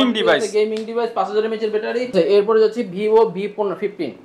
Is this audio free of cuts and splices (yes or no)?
no